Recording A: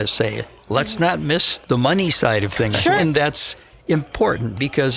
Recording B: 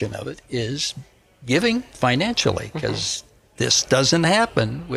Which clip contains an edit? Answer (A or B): A